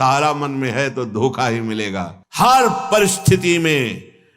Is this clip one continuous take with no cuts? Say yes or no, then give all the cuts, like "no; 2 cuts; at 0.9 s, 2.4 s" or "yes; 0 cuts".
no; 1 cut; at 2.2 s